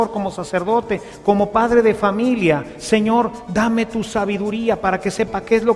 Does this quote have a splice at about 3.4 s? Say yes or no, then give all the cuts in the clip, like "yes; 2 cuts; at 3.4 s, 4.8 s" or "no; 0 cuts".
no; 1 cut; at 1.1 s